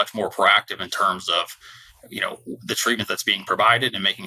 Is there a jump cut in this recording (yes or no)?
no